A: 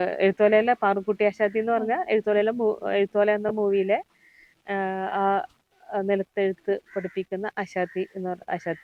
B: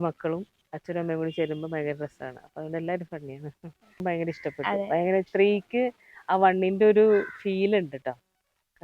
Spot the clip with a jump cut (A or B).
B